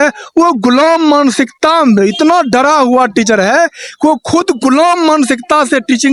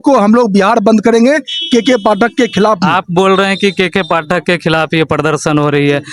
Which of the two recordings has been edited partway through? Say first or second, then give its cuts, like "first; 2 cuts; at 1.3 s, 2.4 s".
second; 1 cut; at 2.9 s